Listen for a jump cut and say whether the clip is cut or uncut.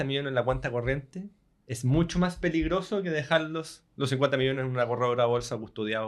uncut